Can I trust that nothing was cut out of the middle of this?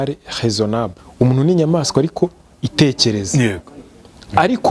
no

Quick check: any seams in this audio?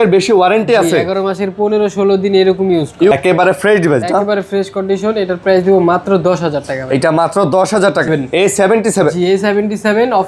yes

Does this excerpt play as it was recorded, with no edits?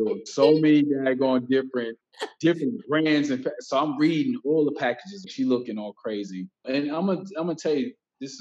no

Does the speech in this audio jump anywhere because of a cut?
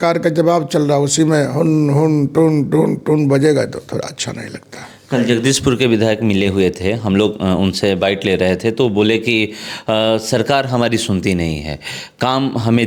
no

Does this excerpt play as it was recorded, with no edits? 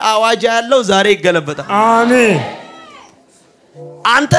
yes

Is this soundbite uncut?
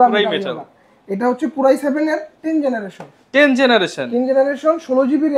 yes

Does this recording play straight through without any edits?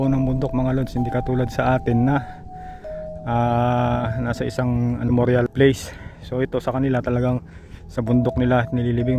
no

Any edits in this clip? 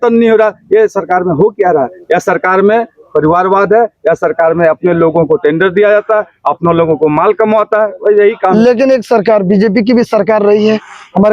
no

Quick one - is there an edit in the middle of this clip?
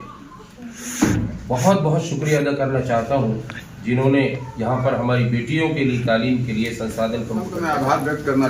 yes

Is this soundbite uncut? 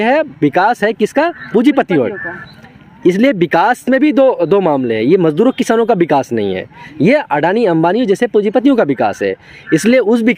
yes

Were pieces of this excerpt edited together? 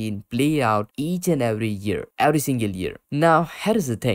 no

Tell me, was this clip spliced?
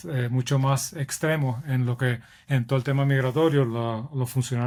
no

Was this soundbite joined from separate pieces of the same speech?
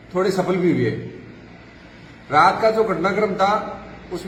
no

